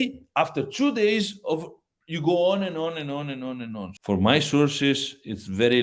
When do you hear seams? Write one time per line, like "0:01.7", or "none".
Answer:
0:03.9